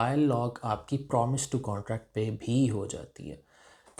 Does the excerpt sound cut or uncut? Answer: uncut